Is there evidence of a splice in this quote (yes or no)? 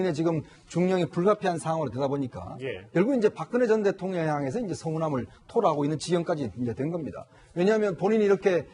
yes